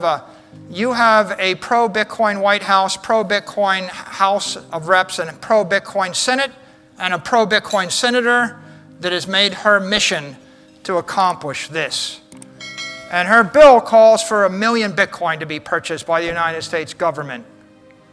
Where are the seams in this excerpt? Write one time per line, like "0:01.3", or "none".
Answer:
none